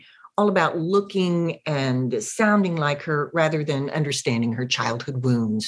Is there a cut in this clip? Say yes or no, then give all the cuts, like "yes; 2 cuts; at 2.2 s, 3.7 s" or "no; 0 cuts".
no; 0 cuts